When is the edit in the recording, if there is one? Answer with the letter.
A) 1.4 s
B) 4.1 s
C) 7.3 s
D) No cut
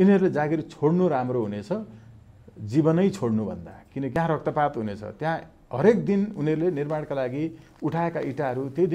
B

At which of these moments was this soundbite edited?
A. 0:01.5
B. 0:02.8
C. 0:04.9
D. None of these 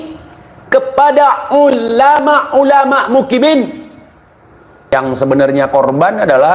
C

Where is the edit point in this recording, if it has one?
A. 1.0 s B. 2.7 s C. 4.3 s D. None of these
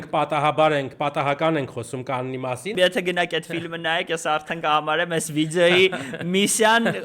B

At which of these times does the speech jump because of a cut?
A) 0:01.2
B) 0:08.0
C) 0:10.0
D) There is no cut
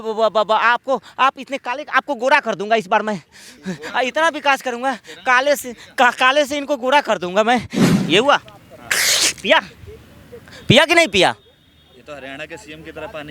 B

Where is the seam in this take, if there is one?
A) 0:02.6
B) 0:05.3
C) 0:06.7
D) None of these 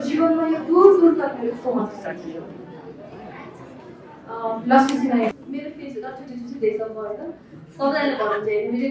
B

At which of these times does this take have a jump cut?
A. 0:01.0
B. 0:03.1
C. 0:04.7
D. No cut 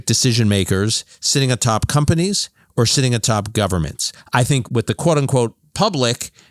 C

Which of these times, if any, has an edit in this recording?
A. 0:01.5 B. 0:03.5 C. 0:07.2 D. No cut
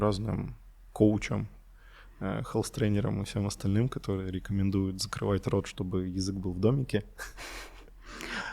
D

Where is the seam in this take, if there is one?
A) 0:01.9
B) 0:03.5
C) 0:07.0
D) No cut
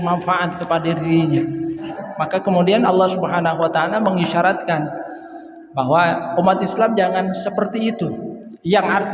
A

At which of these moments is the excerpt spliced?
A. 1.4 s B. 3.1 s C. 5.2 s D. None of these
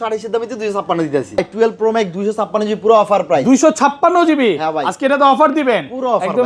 A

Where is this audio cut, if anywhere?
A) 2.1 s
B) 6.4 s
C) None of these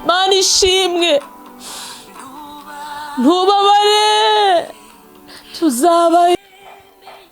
B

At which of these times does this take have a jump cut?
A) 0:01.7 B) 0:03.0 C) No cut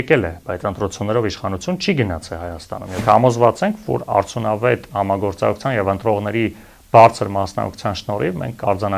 B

